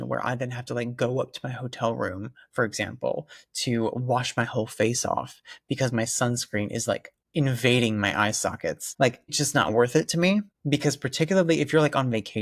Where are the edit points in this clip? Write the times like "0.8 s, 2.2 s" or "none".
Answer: none